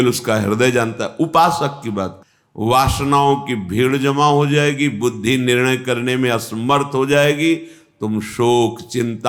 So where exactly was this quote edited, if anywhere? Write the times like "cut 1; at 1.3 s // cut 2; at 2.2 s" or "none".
cut 1; at 2.2 s